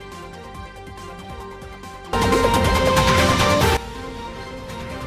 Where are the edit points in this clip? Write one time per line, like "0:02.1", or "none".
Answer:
0:01.4